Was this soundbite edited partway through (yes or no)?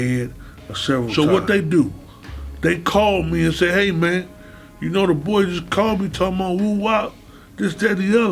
yes